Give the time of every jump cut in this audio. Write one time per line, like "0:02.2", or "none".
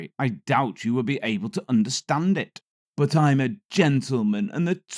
0:02.8